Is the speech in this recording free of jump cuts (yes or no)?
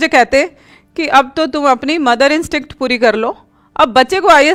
yes